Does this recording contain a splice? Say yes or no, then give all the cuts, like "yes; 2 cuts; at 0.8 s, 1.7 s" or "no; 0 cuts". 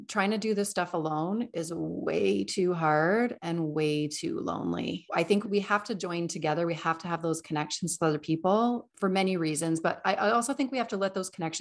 yes; 2 cuts; at 5.4 s, 8.9 s